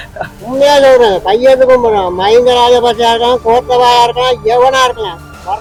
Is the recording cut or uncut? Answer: uncut